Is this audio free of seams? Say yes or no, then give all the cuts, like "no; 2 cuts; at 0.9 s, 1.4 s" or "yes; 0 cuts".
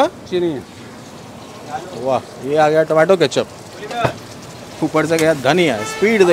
yes; 0 cuts